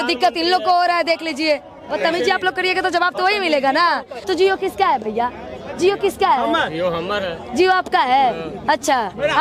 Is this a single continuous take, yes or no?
no